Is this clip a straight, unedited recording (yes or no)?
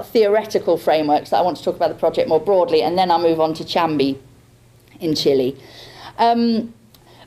yes